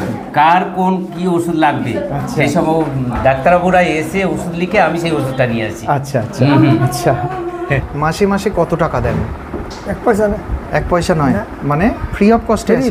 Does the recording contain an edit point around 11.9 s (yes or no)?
no